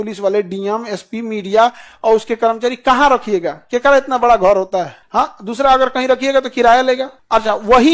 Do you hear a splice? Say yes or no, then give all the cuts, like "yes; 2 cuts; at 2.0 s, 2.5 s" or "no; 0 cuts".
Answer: no; 0 cuts